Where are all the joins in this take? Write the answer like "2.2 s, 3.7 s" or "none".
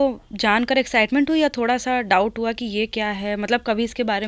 none